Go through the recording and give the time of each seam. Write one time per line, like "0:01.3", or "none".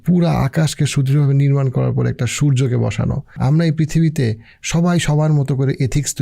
0:03.4